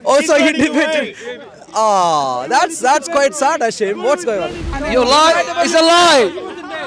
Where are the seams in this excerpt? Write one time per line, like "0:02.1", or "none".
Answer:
0:04.7